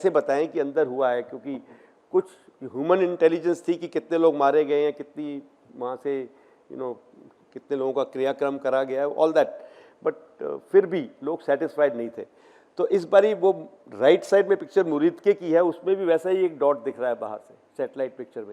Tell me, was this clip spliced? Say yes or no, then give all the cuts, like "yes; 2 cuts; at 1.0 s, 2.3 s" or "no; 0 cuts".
no; 0 cuts